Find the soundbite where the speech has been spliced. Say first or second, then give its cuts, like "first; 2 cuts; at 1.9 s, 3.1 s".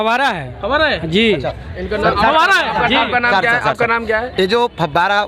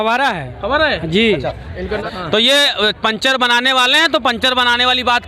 second; 1 cut; at 2.0 s